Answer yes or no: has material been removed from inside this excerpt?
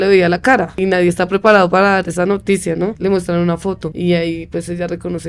yes